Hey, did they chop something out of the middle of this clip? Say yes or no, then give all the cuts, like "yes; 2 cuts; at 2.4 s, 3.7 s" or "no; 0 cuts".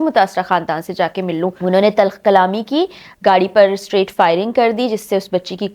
yes; 1 cut; at 1.6 s